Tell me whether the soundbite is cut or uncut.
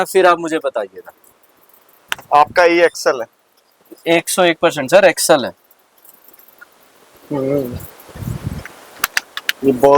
uncut